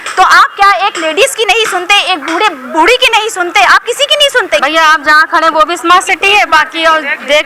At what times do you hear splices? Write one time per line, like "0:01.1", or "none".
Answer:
0:04.6